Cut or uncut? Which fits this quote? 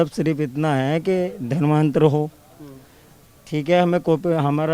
uncut